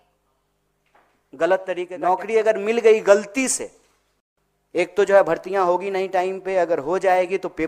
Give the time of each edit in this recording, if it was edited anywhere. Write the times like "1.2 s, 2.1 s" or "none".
1.9 s

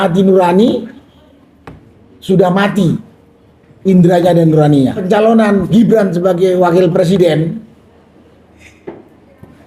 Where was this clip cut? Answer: 5.0 s

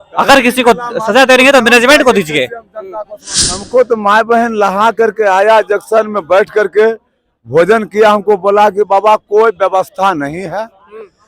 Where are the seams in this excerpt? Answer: 3.6 s

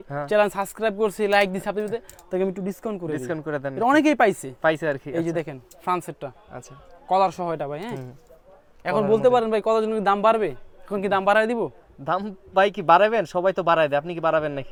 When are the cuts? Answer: none

